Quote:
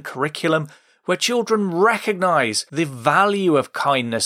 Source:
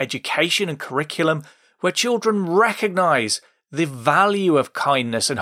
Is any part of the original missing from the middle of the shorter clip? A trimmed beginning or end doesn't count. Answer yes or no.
yes